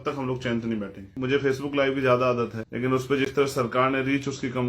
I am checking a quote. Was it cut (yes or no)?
yes